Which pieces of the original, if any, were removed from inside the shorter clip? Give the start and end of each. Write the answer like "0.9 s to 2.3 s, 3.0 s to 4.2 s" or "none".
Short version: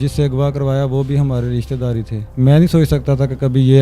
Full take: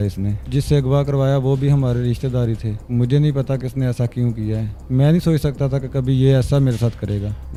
2.7 s to 4.7 s